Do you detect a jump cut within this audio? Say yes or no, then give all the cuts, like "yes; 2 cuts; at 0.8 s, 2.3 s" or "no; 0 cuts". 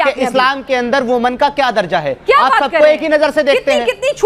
no; 0 cuts